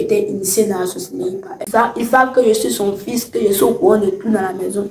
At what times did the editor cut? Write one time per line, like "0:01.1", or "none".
0:01.6